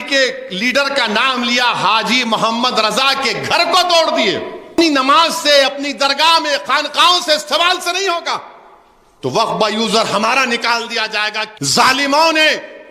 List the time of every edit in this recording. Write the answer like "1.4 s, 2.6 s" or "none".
4.8 s, 11.5 s